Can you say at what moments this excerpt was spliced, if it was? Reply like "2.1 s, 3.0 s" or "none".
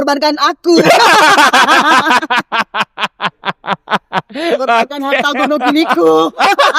none